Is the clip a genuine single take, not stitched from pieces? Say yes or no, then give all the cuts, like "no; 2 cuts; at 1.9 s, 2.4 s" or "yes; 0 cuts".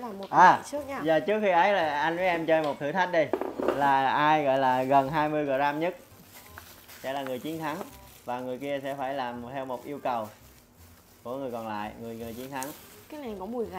yes; 0 cuts